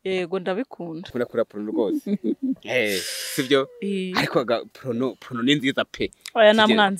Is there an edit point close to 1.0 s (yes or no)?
yes